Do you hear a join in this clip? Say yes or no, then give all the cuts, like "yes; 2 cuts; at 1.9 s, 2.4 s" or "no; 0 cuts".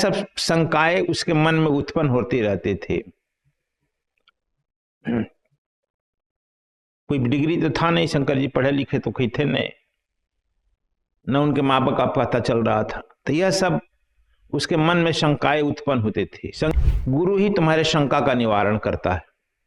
yes; 1 cut; at 16.7 s